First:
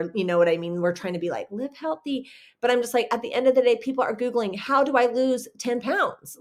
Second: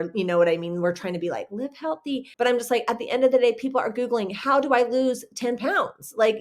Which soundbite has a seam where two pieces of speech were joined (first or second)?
second